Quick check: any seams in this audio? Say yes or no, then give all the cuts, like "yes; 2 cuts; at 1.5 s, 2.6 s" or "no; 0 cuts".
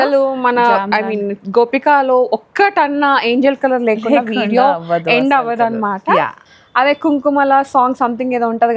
yes; 1 cut; at 6.5 s